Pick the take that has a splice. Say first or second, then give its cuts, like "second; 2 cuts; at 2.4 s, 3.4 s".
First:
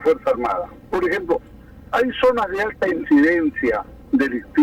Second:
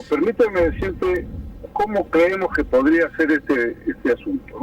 second; 1 cut; at 1.3 s